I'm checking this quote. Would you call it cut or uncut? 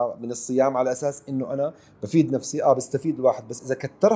uncut